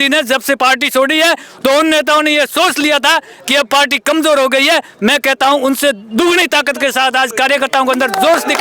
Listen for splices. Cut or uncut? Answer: uncut